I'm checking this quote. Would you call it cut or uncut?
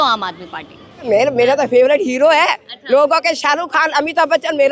cut